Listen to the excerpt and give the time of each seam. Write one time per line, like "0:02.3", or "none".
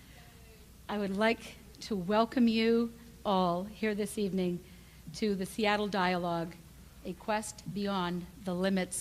0:01.1